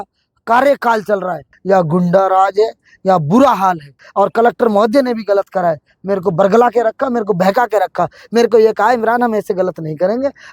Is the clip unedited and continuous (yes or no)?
no